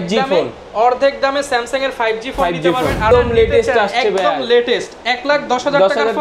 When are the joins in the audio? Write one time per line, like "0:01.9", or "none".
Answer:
0:03.1

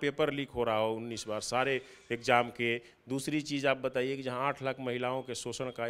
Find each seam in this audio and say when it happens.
none

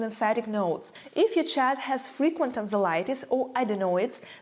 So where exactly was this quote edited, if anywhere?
0:00.9

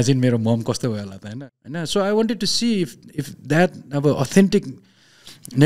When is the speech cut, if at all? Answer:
0:01.3

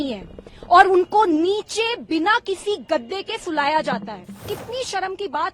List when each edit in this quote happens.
0:04.5

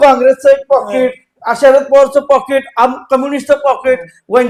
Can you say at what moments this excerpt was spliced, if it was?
none

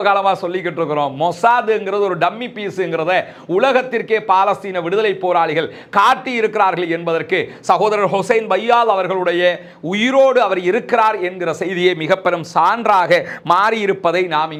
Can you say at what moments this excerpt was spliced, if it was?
none

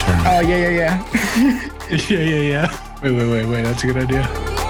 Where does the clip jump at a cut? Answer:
none

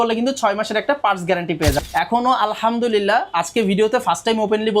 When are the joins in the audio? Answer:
0:01.8

